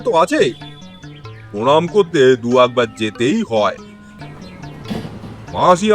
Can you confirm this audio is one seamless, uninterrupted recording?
no; 1 cut; at 4.2 s

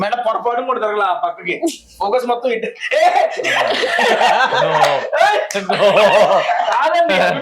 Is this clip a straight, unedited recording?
yes; 0 cuts

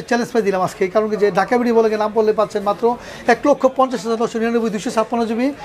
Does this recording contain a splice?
no; 0 cuts

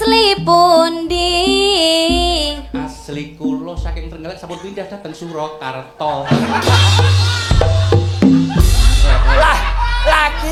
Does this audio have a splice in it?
no; 0 cuts

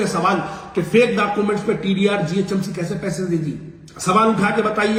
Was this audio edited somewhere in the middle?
no; 0 cuts

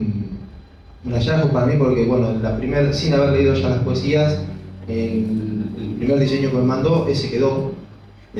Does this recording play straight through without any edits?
yes; 0 cuts

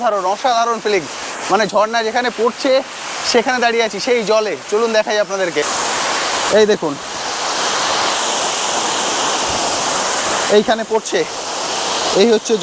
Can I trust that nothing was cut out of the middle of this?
yes; 0 cuts

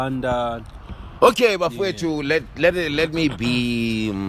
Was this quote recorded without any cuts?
yes; 0 cuts

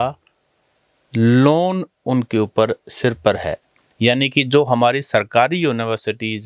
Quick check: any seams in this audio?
no; 0 cuts

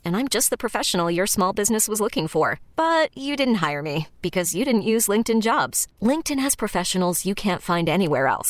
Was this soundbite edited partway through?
no; 0 cuts

